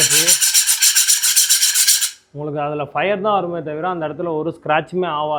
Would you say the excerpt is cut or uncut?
uncut